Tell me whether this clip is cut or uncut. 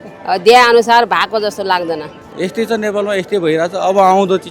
cut